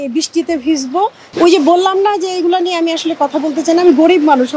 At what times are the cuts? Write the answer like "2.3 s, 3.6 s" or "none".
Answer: 1.3 s